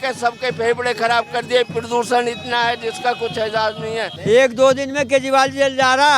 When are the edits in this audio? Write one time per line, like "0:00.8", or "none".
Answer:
0:04.1